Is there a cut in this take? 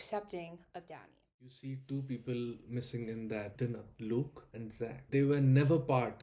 yes; 1 cut; at 1.2 s

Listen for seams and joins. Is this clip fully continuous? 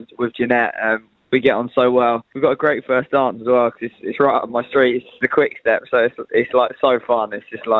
no; 2 cuts; at 2.3 s, 5.1 s

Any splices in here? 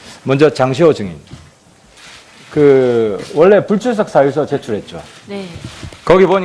yes; 1 cut; at 1.1 s

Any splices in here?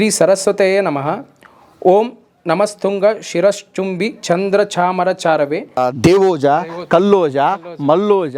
yes; 1 cut; at 5.8 s

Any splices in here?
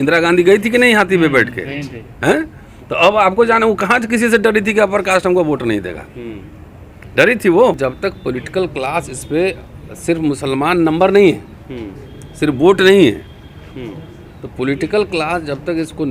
yes; 1 cut; at 7.8 s

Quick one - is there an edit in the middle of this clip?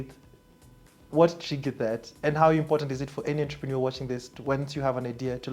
no; 0 cuts

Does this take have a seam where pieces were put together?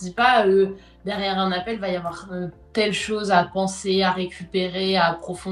no; 0 cuts

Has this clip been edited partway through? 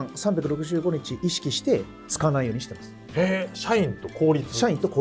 no; 0 cuts

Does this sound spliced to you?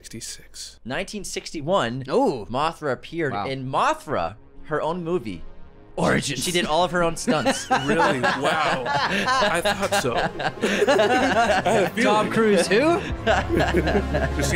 no; 0 cuts

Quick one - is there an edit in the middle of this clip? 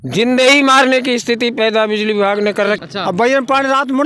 yes; 1 cut; at 2.9 s

